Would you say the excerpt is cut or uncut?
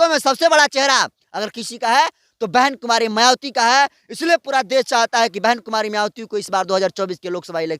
uncut